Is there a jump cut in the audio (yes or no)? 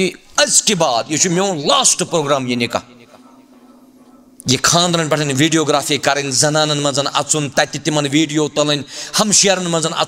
no